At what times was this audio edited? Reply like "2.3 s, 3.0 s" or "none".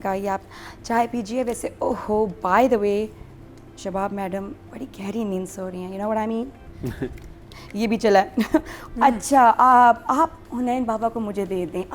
8.8 s